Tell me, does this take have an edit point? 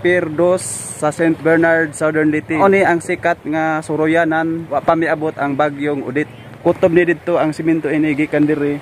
yes; 3 cuts; at 2.6 s, 4.7 s, 6.4 s

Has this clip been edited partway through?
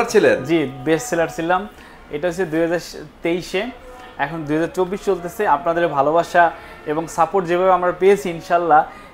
no; 0 cuts

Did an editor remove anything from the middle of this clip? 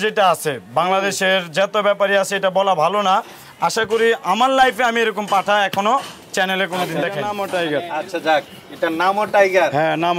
yes; 1 cut; at 7.3 s

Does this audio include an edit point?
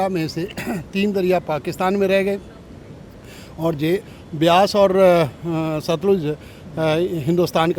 no; 0 cuts

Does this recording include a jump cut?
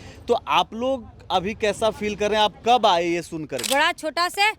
yes; 1 cut; at 3.6 s

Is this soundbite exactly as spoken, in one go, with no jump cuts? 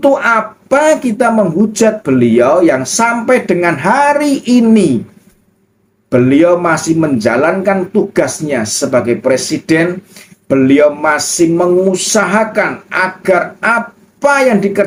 yes; 0 cuts

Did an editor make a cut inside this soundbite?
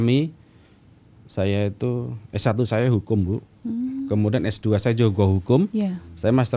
no; 0 cuts

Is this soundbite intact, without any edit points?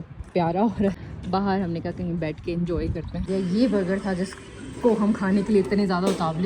no; 2 cuts; at 1.0 s, 3.2 s

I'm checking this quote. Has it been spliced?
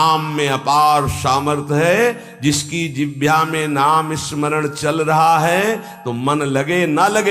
no; 0 cuts

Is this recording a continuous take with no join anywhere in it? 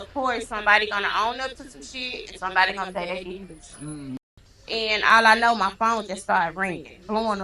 no; 1 cut; at 4.2 s

